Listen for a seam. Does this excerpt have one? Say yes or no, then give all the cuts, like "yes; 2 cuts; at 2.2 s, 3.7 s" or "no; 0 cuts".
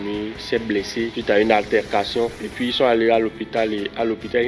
no; 0 cuts